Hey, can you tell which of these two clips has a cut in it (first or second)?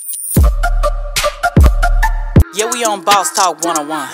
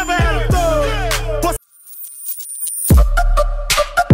second